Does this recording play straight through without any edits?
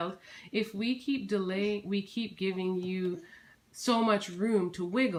yes; 0 cuts

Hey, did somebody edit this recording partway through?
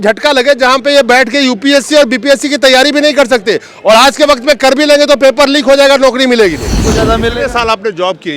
yes; 1 cut; at 6.9 s

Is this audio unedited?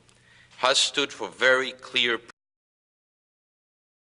yes; 0 cuts

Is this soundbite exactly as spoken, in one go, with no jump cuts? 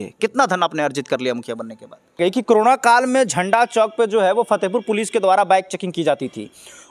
no; 1 cut; at 2.2 s

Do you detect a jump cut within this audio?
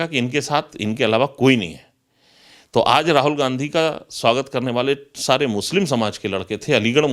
no; 0 cuts

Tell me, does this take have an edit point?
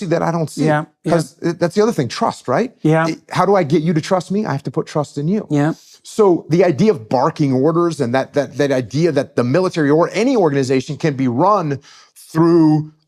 no; 0 cuts

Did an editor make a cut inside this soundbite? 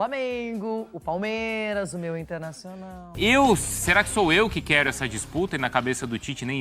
yes; 1 cut; at 3.1 s

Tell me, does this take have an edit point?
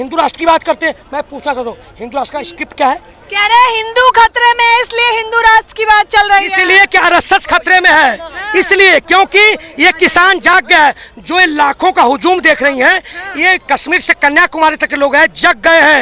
no; 0 cuts

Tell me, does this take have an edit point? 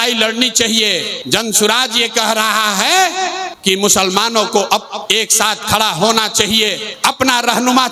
yes; 4 cuts; at 1.1 s, 3.5 s, 5.0 s, 6.8 s

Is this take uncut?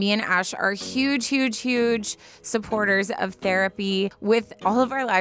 no; 1 cut; at 4.2 s

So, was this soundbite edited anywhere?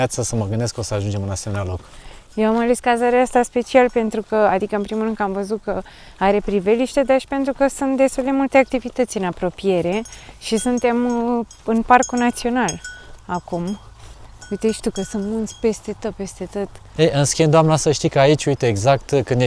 no; 0 cuts

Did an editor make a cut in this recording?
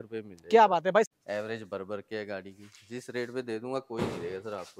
yes; 1 cut; at 1.1 s

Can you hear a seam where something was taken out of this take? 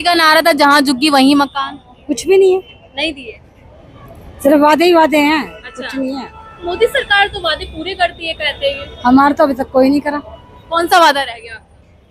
no; 0 cuts

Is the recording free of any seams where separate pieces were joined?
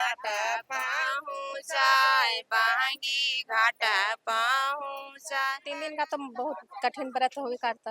no; 1 cut; at 5.7 s

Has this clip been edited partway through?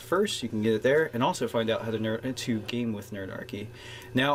no; 0 cuts

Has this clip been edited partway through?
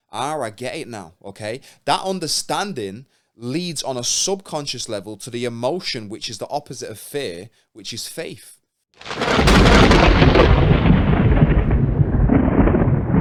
no; 0 cuts

